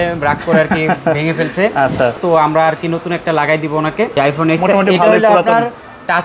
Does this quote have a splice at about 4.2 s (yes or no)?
yes